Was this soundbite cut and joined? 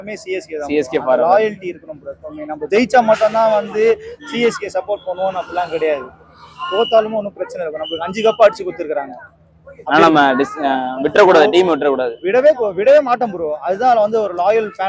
no; 0 cuts

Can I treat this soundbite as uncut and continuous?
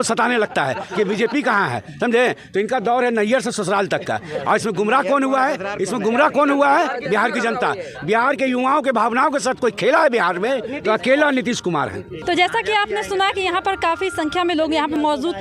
yes; 0 cuts

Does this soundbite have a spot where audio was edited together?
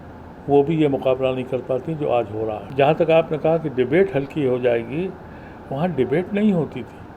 yes; 1 cut; at 2.6 s

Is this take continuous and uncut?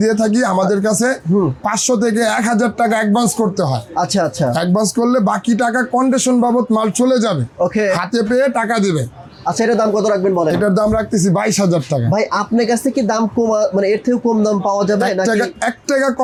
yes; 0 cuts

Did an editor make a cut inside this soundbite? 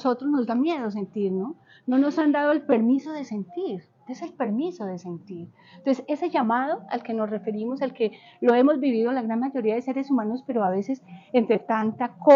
no; 0 cuts

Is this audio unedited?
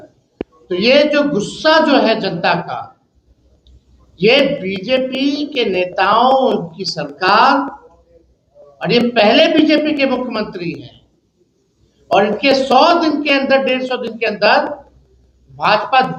yes; 0 cuts

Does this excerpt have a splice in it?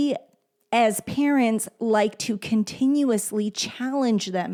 no; 0 cuts

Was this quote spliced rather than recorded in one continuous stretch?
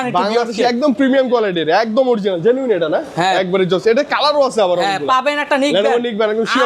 no; 0 cuts

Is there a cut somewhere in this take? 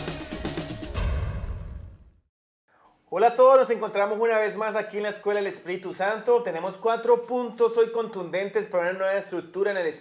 yes; 1 cut; at 5.7 s

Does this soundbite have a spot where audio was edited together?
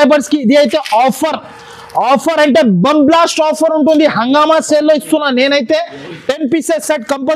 no; 0 cuts

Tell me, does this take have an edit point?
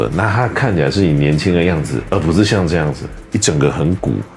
yes; 1 cut; at 2.0 s

